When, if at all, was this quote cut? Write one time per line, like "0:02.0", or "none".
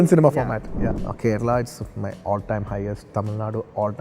0:01.0